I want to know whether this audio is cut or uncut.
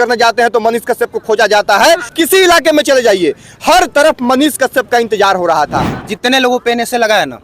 cut